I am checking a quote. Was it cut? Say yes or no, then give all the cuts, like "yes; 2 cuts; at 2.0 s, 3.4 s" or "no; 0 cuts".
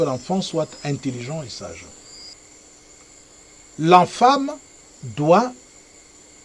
yes; 1 cut; at 2.3 s